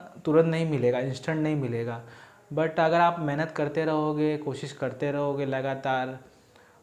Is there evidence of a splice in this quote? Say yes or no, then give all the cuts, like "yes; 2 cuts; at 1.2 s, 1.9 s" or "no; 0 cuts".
no; 0 cuts